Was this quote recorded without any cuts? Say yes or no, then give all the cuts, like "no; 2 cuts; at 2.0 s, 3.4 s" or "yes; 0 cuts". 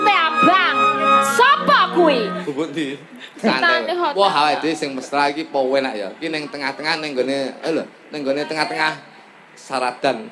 no; 1 cut; at 2.4 s